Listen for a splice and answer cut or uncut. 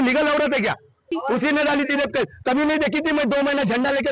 cut